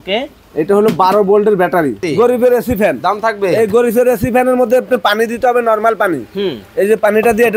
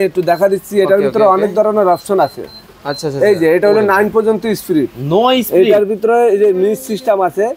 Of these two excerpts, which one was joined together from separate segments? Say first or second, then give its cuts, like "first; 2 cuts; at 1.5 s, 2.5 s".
first; 1 cut; at 2.0 s